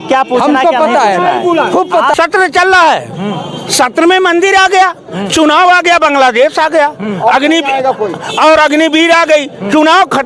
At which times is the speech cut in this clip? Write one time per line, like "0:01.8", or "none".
0:02.1